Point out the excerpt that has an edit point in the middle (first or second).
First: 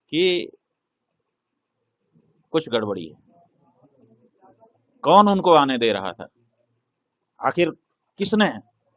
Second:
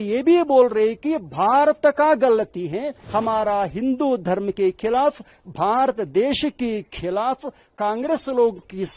second